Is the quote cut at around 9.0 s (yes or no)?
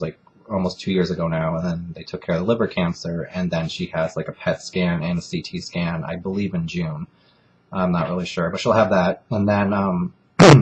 no